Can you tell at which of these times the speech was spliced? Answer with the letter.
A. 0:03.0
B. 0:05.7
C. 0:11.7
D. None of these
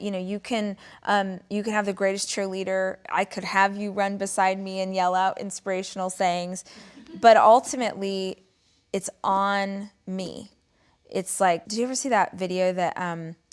C